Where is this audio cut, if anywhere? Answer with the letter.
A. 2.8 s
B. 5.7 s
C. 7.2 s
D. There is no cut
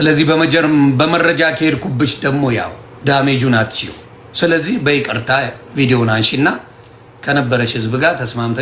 A